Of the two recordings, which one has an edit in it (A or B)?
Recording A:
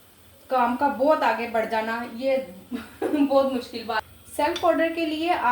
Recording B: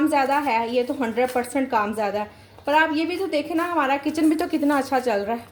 A